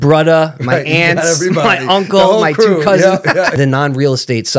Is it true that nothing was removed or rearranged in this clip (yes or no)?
no